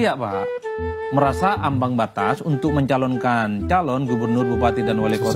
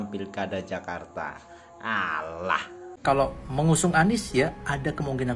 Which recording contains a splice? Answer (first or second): second